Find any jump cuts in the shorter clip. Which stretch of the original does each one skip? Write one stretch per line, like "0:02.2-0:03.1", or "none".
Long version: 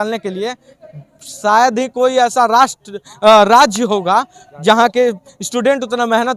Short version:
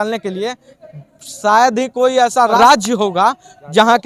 0:02.6-0:03.5